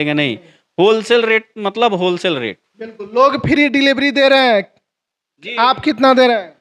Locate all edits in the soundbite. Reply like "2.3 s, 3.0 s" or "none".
none

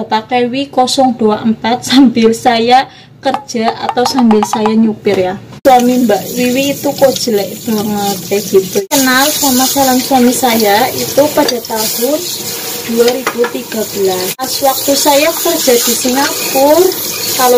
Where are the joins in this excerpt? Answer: 5.5 s, 8.8 s, 14.4 s

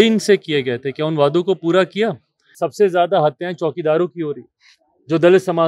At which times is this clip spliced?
2.6 s

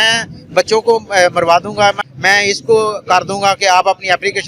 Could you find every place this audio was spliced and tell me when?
2.1 s

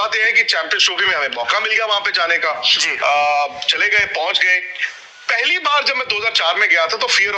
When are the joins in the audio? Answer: none

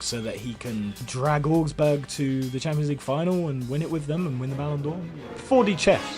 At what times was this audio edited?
5.3 s

